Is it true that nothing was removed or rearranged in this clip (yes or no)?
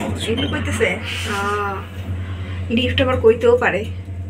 yes